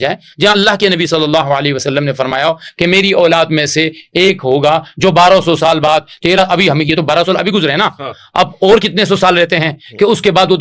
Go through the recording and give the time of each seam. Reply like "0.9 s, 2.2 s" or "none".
none